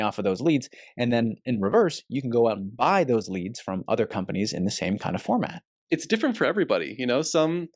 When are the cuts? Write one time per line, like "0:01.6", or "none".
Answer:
0:05.6